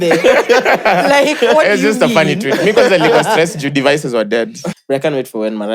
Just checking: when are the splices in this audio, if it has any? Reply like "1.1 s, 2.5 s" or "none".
4.6 s